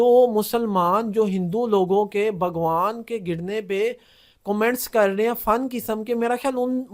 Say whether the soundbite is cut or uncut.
uncut